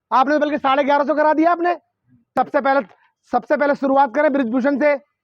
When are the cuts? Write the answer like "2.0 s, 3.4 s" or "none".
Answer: 2.3 s